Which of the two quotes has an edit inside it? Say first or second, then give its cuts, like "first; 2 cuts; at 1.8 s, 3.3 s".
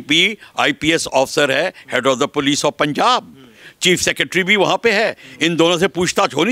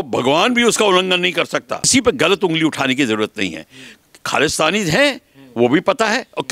second; 1 cut; at 1.9 s